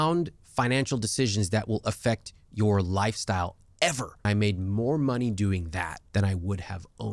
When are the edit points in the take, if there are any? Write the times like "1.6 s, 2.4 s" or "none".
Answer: 4.2 s, 6.0 s

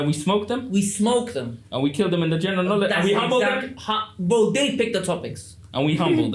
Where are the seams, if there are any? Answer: none

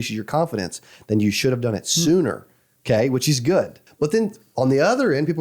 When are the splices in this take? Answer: 3.8 s

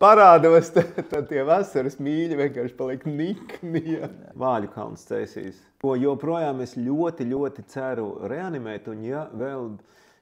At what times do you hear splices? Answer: 4.3 s, 5.6 s

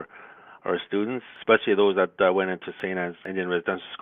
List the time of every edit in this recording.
1.3 s, 2.8 s

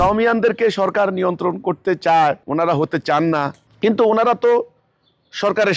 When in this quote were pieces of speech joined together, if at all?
2.4 s, 3.6 s

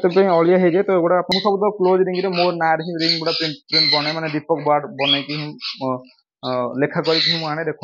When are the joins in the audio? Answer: 1.3 s

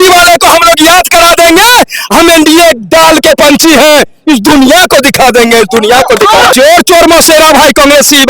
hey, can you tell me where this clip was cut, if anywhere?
6.5 s

